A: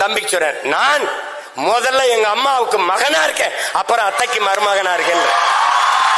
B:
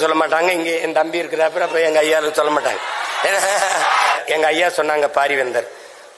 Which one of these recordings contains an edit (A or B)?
B